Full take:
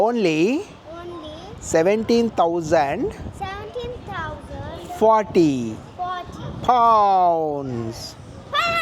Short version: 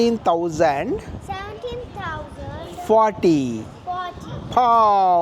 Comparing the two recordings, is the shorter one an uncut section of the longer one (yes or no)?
yes